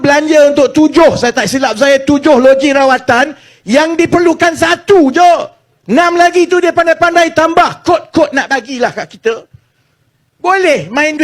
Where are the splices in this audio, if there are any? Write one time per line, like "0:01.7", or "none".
none